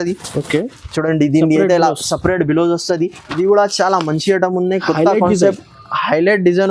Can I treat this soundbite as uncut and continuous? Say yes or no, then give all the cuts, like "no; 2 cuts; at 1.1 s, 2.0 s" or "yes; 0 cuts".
no; 1 cut; at 3.2 s